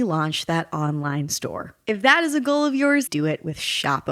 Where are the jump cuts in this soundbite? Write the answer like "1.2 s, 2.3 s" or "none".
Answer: 3.1 s